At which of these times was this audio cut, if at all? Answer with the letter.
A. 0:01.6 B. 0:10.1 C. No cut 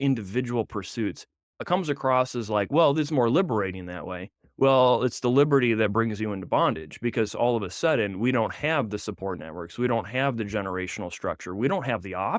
A